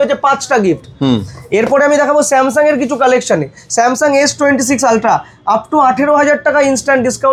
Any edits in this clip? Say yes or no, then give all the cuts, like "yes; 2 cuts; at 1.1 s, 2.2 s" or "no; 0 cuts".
no; 0 cuts